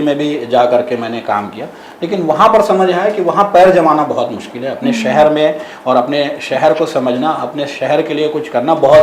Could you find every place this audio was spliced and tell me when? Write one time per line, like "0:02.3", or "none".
none